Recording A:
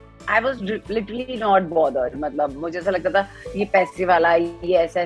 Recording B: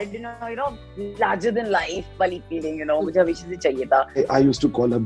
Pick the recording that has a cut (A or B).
B